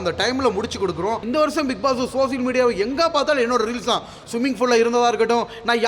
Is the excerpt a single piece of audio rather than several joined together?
no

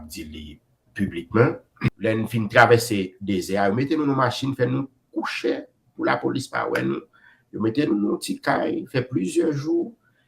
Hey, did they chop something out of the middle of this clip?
yes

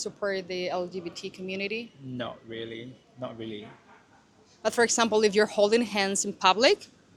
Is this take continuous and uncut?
yes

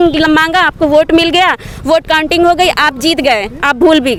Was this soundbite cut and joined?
no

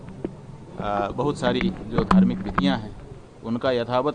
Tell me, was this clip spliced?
no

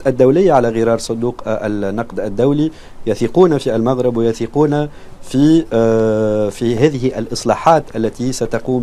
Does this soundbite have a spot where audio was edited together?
no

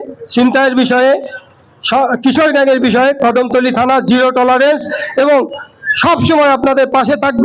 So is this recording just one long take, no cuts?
yes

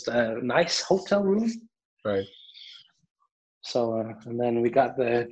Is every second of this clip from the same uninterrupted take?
yes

